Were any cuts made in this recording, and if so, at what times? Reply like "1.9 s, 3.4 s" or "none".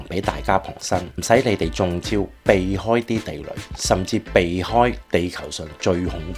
1.1 s, 5.0 s